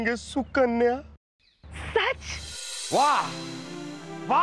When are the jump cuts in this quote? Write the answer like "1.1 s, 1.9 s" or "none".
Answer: 2.3 s